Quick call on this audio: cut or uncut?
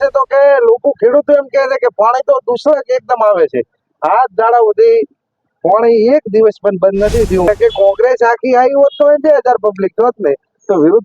cut